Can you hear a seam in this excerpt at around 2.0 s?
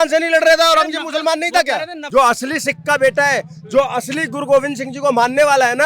yes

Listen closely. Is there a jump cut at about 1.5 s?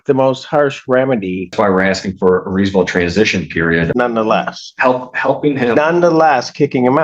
yes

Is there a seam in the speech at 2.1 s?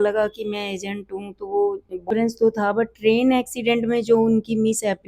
yes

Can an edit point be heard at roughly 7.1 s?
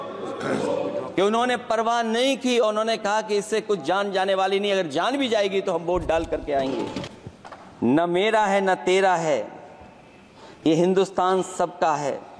yes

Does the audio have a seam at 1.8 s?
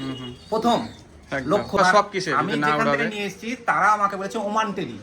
yes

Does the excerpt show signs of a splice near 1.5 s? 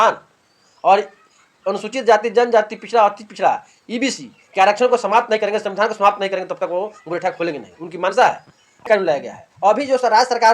no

